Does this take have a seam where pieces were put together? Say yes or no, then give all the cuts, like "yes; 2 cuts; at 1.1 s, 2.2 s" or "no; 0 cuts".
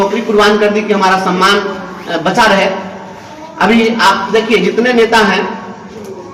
no; 0 cuts